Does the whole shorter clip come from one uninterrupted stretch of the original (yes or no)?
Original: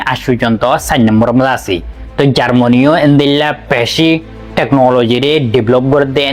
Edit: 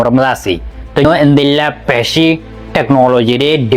no